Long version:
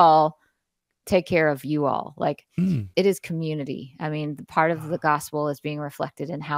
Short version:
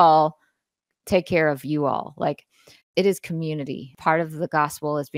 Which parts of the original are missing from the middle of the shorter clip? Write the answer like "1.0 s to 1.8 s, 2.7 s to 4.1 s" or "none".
3.9 s to 4.4 s